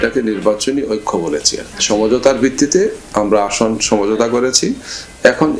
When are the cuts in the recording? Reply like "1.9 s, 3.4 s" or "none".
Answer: none